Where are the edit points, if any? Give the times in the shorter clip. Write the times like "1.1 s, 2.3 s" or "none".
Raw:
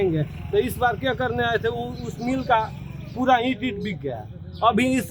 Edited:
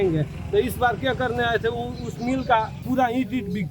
2.8 s